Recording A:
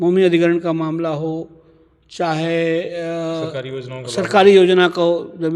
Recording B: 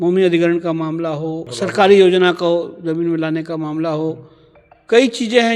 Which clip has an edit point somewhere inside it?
B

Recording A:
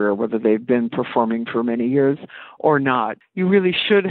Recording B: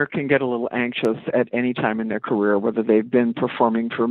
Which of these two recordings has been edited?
A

